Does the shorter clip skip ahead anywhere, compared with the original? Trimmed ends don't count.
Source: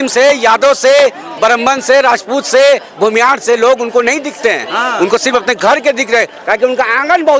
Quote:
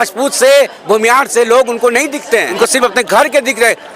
yes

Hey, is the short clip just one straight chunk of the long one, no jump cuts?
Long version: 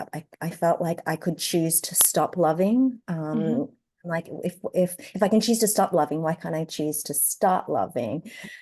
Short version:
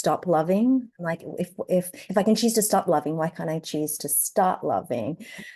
no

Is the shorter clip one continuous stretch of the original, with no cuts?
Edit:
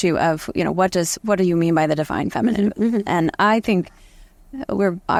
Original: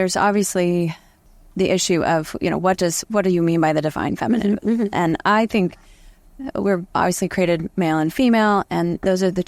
yes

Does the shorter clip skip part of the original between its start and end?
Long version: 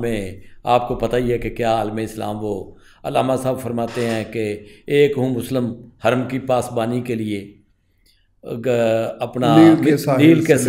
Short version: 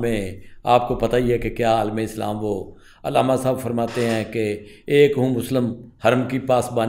no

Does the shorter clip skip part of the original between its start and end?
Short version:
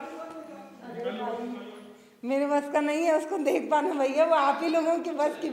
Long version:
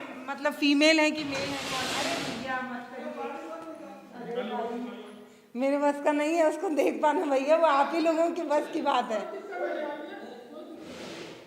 no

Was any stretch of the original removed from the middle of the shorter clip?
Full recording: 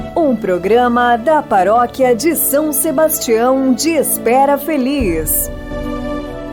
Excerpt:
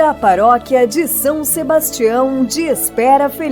no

